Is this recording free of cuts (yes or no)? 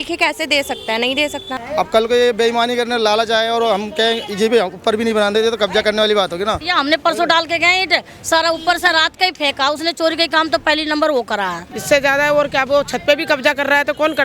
no